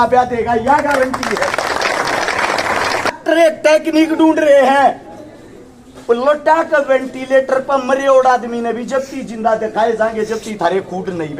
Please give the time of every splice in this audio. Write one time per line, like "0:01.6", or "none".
0:03.2

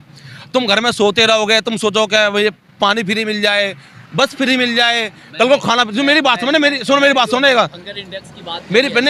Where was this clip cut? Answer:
none

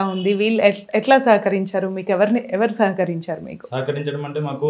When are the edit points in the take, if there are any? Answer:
none

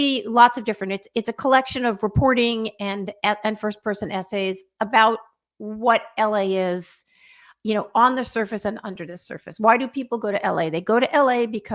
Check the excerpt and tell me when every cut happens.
none

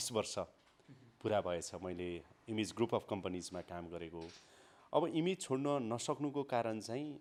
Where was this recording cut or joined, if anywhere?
none

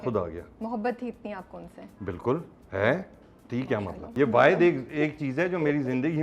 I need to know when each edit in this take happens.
0:04.1

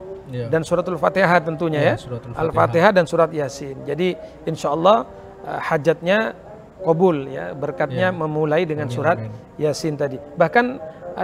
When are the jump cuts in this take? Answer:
none

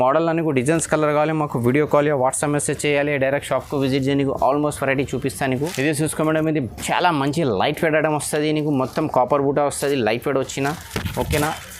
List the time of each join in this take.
0:05.7

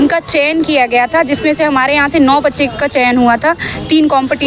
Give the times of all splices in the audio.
none

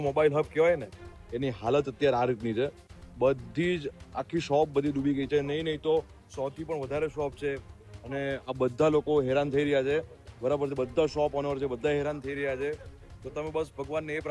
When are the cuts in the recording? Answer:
none

